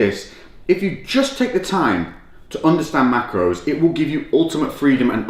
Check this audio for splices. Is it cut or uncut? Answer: uncut